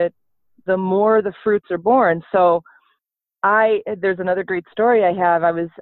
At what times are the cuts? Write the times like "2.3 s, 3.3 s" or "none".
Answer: none